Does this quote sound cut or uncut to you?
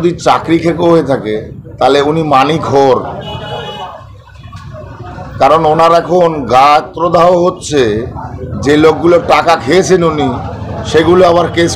uncut